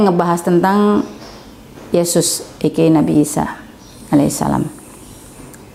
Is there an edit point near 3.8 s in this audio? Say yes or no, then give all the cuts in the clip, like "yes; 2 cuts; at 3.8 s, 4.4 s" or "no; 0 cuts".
no; 0 cuts